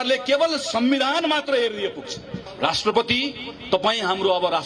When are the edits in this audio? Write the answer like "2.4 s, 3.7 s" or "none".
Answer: 2.4 s